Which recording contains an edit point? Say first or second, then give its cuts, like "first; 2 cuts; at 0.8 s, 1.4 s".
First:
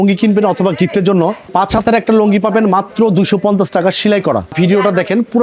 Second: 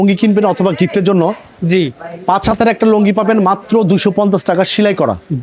first; 2 cuts; at 1.4 s, 4.5 s